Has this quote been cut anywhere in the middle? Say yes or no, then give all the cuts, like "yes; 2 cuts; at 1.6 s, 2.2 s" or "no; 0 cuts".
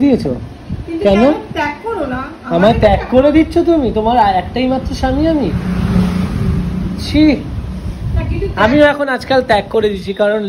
no; 0 cuts